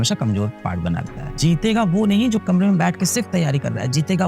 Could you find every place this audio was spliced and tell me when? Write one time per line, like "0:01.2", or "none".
0:01.2